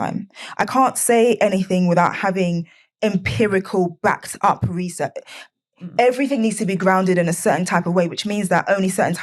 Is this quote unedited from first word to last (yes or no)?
yes